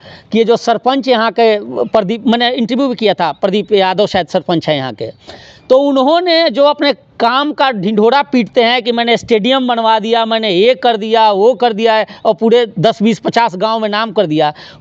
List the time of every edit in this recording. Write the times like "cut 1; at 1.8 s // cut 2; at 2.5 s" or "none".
none